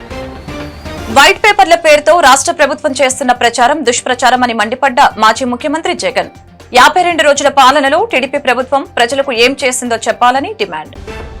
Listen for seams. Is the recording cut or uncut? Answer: cut